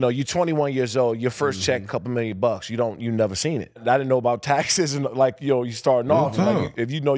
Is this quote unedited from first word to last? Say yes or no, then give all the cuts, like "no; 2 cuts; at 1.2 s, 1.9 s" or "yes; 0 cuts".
no; 1 cut; at 3.8 s